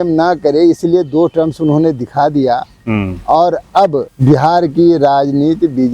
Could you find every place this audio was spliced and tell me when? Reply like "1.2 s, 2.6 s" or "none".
4.1 s